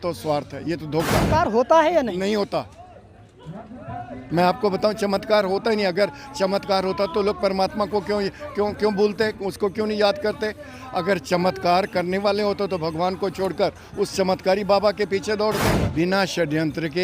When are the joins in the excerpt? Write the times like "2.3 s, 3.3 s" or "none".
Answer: 1.3 s, 15.8 s

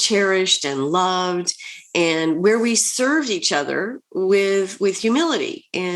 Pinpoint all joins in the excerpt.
none

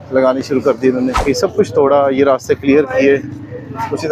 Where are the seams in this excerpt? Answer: 1.2 s

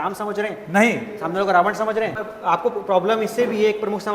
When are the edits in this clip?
2.2 s

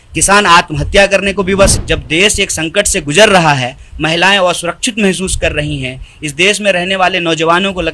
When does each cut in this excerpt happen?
1.8 s

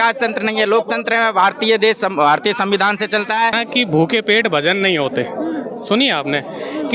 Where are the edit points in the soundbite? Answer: 3.6 s

